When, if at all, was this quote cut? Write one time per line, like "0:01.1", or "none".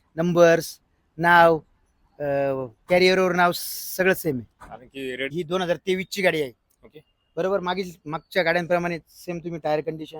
0:05.3